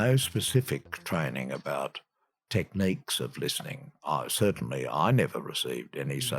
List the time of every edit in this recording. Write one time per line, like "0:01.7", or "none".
0:02.4